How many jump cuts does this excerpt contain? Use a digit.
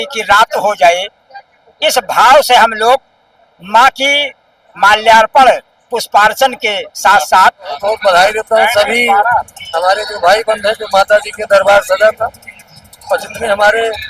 1